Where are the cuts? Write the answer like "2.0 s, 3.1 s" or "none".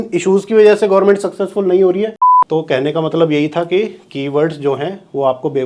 2.3 s